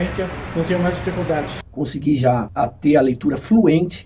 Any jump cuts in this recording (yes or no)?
yes